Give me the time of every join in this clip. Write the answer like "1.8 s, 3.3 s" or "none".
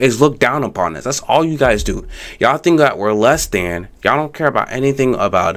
none